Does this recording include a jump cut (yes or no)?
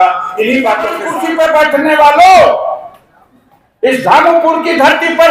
yes